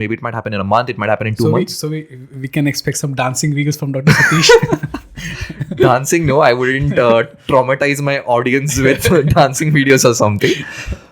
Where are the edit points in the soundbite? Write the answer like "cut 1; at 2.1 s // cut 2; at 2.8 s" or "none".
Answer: none